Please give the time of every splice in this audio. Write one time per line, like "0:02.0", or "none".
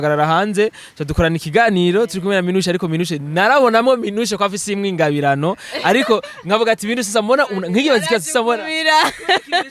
none